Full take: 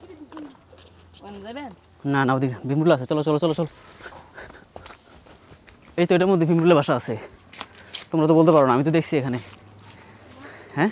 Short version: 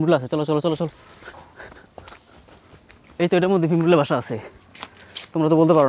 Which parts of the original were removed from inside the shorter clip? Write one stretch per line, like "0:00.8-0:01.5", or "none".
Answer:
none